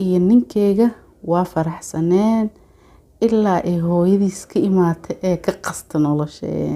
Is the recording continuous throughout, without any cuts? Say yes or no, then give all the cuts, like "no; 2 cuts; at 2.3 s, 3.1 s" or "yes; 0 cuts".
yes; 0 cuts